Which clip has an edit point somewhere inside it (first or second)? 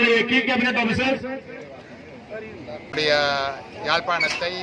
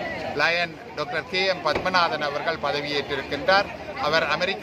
first